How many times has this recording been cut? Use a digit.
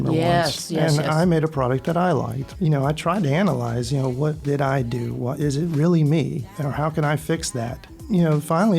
4